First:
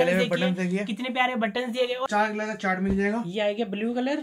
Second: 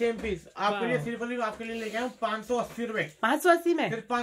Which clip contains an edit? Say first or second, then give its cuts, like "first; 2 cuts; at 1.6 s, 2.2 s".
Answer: first; 1 cut; at 2.1 s